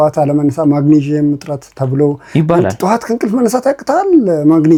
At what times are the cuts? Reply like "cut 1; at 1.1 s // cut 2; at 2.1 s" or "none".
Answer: none

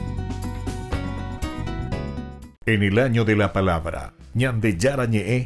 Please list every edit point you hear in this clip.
cut 1; at 2.5 s

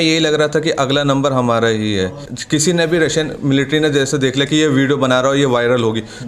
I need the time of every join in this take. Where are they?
cut 1; at 2.2 s

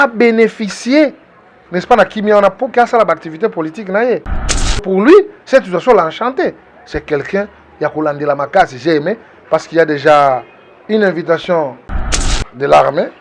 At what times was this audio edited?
cut 1; at 12.2 s

